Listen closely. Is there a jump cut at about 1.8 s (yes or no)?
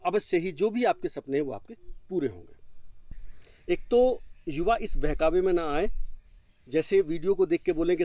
no